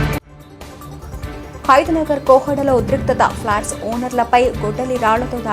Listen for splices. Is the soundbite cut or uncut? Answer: uncut